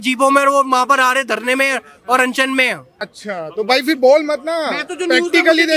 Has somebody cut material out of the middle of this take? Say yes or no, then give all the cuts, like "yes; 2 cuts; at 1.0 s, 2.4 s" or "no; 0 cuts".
yes; 1 cut; at 2.9 s